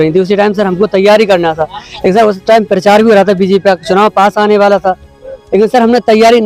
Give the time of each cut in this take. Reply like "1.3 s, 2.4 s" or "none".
none